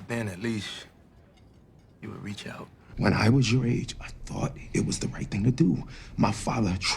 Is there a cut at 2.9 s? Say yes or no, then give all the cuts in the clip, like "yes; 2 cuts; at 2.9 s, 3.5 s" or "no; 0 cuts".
yes; 1 cut; at 2.9 s